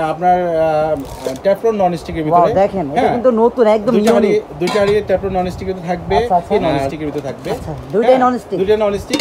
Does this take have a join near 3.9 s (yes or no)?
no